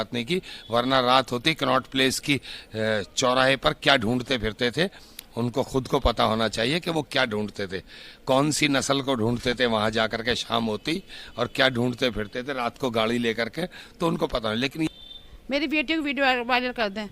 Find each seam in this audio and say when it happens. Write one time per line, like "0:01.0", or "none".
0:14.9

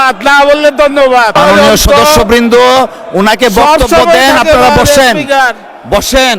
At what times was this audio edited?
0:01.4

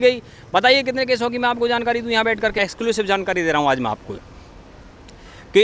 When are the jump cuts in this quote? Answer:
0:02.7

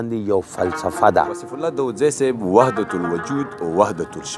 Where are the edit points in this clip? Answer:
0:01.6

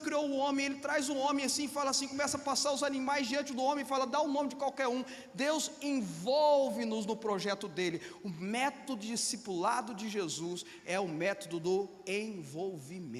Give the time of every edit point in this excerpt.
none

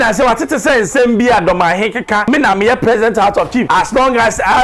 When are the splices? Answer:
0:02.2
0:03.7

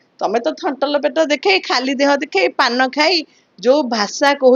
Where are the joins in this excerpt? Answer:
none

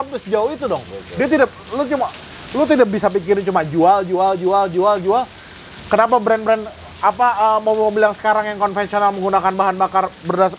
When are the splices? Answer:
none

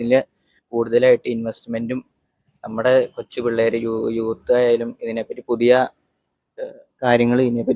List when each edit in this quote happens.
none

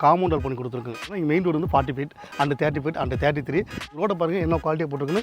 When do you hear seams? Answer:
0:01.0
0:03.9

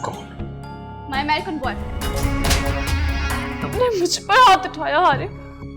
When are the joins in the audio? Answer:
0:02.0
0:03.6

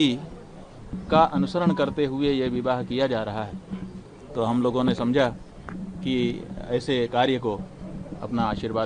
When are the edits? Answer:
none

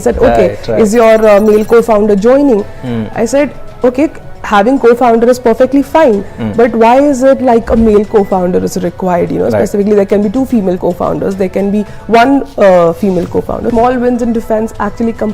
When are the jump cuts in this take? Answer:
0:10.8
0:13.7

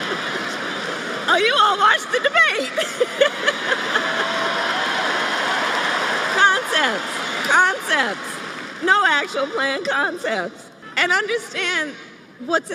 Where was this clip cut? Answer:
none

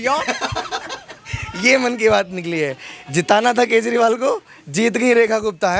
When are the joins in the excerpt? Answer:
none

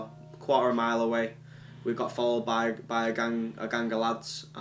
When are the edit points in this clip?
0:01.1
0:02.9

